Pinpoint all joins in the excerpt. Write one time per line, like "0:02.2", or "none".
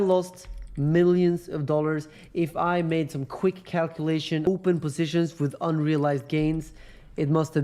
0:04.5